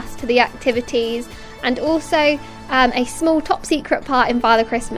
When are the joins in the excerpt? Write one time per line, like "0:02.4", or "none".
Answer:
0:01.4